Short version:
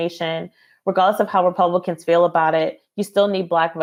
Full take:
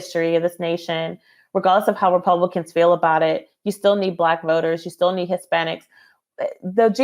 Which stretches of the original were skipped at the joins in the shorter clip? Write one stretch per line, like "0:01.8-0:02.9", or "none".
none